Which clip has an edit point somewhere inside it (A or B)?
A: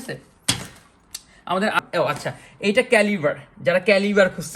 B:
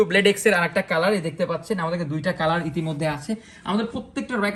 A